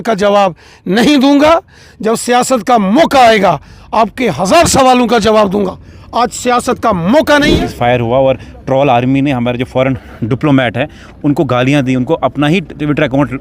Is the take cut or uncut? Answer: cut